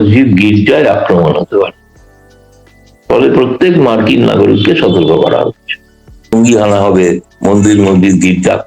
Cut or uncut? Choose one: cut